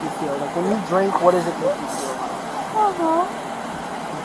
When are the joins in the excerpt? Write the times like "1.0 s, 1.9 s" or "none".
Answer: none